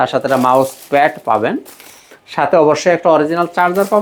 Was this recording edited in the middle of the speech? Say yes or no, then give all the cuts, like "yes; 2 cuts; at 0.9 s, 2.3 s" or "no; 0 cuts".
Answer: no; 0 cuts